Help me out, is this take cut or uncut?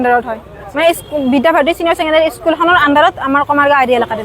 uncut